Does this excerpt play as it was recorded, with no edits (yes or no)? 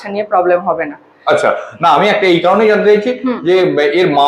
yes